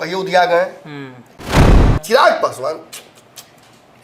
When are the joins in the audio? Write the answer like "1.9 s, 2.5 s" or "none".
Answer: 1.6 s